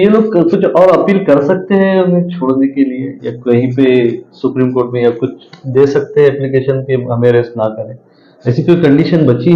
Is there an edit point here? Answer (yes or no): no